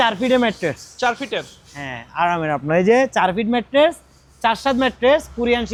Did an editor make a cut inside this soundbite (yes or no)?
no